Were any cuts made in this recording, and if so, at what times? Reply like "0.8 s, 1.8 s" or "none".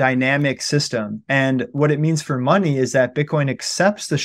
none